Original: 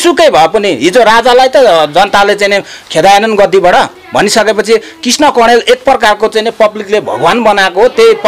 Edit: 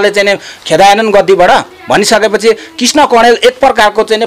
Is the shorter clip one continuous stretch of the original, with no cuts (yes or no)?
yes